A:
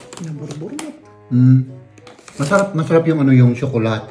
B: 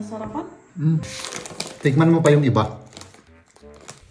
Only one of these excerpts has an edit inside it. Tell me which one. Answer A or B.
B